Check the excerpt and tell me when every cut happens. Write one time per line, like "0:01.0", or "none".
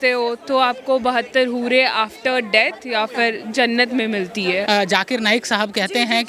0:04.6